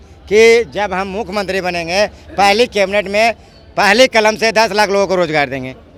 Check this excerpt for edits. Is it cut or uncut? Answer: uncut